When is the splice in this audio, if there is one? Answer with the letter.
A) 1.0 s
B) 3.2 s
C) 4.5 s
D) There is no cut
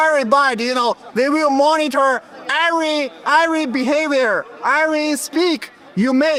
D